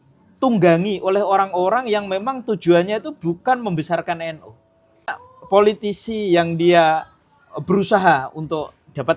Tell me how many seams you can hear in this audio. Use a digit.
1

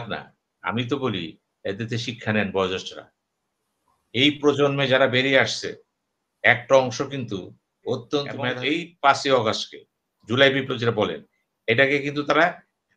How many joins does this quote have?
1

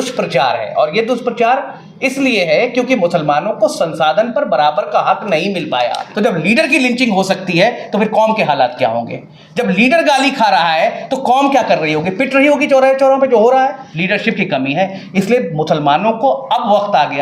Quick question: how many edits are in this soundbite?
2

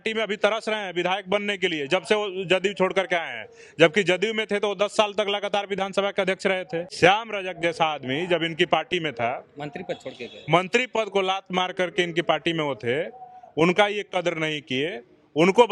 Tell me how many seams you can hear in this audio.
1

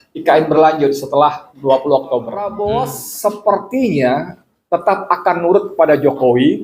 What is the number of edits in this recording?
1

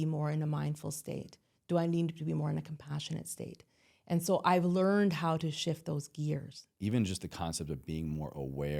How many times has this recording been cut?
1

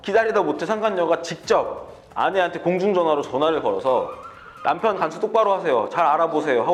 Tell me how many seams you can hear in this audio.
0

